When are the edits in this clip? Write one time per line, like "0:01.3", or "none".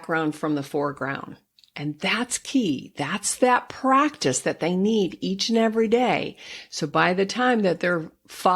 none